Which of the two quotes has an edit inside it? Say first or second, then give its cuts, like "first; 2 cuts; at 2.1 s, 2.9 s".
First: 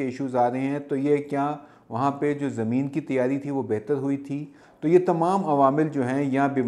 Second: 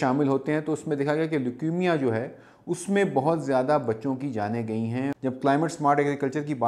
second; 1 cut; at 5.1 s